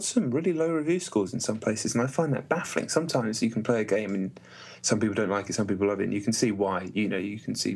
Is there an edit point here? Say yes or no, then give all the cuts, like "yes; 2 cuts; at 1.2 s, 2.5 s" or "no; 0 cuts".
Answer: no; 0 cuts